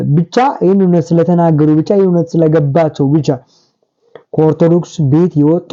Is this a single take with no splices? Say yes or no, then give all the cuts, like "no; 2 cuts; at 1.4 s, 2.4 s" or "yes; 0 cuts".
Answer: yes; 0 cuts